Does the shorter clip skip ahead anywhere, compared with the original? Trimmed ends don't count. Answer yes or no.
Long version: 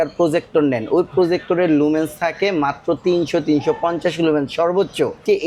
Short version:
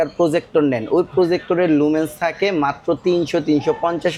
no